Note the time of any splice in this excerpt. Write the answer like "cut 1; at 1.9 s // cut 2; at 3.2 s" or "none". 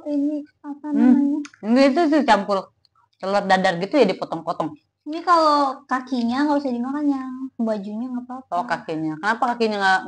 none